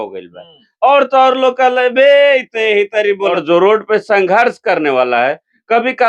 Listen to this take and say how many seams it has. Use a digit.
1